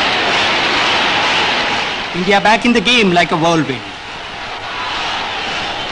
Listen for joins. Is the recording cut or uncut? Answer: uncut